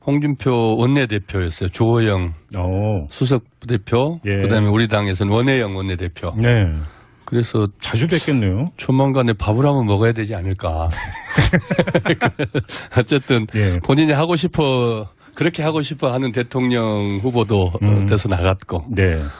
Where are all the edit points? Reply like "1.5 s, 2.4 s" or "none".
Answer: 4.2 s